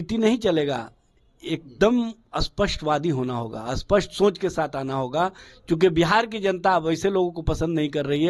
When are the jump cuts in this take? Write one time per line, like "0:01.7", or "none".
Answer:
0:05.5